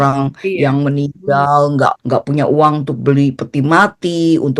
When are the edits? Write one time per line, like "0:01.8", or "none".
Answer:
0:02.0